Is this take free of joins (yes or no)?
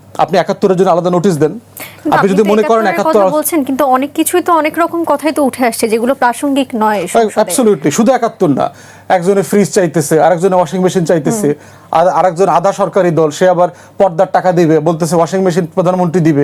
yes